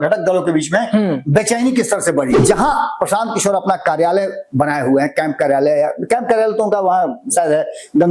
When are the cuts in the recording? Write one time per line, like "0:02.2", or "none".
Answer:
0:02.4